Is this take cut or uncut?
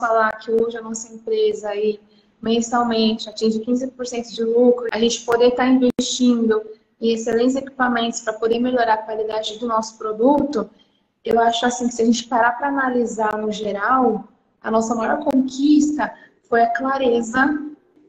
cut